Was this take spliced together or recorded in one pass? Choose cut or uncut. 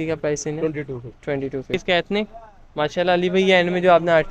cut